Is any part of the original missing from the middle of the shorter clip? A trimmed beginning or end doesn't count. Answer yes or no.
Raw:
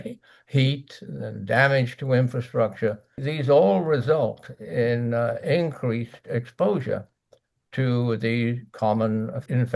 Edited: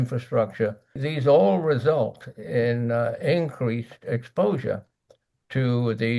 no